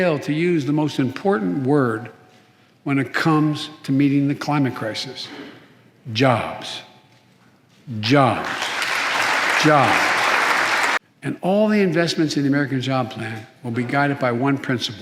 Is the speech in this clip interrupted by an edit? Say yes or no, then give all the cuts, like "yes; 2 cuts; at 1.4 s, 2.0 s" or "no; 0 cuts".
yes; 1 cut; at 11.0 s